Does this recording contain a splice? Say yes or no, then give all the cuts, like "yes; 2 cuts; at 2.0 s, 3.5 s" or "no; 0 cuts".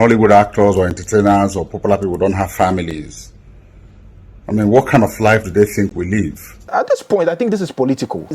yes; 1 cut; at 6.7 s